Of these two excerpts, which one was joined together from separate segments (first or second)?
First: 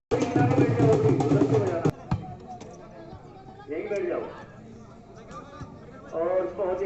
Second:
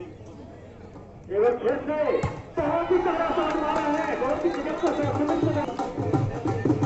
second